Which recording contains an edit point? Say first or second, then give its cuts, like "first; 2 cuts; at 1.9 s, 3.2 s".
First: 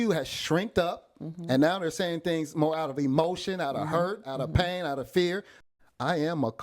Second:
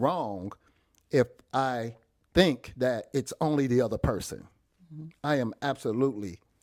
first; 1 cut; at 5.6 s